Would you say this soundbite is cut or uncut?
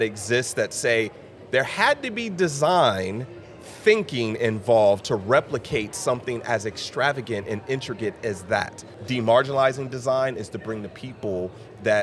cut